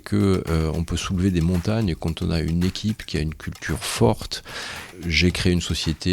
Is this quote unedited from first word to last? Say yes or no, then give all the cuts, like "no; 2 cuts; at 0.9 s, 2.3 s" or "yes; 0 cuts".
no; 1 cut; at 4.9 s